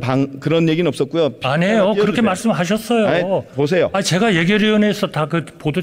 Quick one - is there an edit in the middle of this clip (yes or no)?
no